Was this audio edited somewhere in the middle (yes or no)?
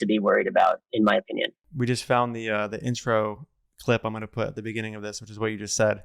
yes